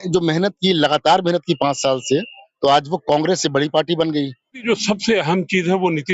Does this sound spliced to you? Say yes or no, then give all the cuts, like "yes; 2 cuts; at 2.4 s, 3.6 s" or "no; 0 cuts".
yes; 1 cut; at 4.6 s